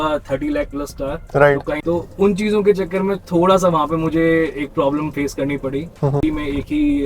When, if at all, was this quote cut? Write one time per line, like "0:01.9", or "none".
0:01.8
0:06.2

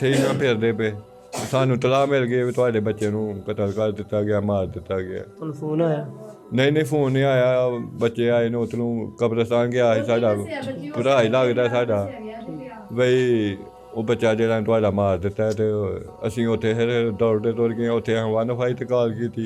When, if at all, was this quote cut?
none

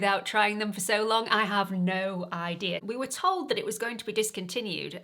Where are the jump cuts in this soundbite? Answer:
0:02.8

